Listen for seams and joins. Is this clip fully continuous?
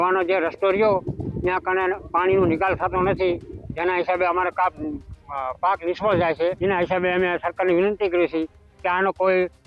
no; 1 cut; at 6.6 s

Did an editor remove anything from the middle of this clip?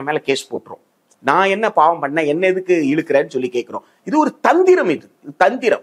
no; 0 cuts

